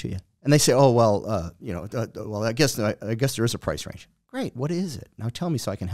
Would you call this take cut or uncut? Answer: uncut